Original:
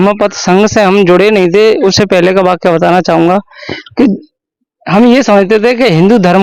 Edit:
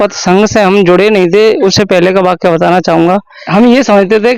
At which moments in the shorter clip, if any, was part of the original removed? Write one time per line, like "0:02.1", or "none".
0:03.4